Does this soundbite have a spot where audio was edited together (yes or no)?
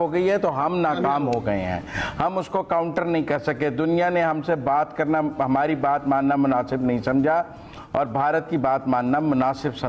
no